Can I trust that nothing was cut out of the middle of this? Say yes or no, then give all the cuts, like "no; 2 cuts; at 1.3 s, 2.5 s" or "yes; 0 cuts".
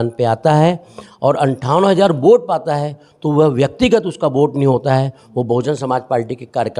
yes; 0 cuts